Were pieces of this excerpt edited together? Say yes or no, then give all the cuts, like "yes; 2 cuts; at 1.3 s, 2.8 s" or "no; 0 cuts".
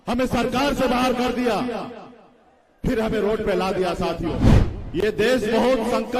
yes; 1 cut; at 4.5 s